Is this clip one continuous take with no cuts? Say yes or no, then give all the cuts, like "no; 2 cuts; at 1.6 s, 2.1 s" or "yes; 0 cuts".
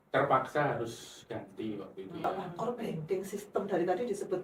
no; 1 cut; at 2.2 s